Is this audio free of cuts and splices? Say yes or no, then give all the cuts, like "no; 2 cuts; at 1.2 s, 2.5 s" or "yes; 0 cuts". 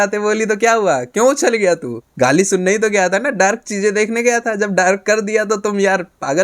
yes; 0 cuts